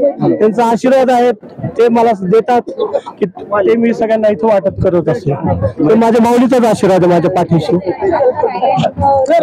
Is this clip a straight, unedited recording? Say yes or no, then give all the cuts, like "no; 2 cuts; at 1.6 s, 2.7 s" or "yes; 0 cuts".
yes; 0 cuts